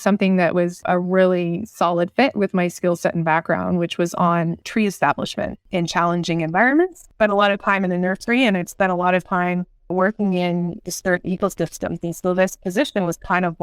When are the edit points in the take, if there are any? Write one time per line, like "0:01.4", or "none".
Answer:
0:04.6